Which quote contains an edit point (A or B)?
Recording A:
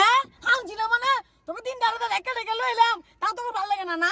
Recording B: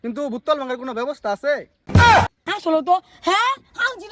B